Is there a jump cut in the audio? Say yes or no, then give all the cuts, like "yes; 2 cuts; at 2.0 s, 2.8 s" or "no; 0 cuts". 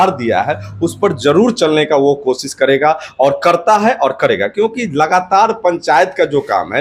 no; 0 cuts